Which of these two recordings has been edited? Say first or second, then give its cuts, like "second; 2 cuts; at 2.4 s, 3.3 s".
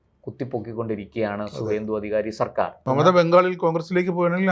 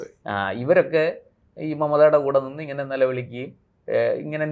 first; 1 cut; at 2.8 s